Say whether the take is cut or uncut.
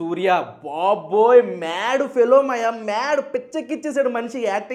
uncut